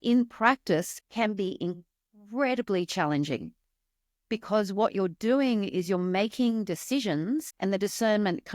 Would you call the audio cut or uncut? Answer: cut